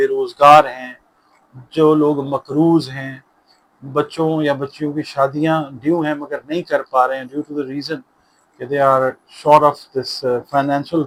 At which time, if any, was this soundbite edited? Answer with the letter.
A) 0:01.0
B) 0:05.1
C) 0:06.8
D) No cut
D